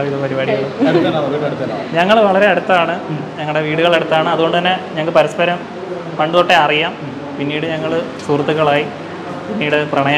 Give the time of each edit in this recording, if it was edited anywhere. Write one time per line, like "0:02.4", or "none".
none